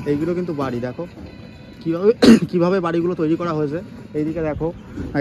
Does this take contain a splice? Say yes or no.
no